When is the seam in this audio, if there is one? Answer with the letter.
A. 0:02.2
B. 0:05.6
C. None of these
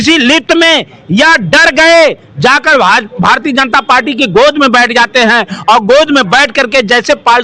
C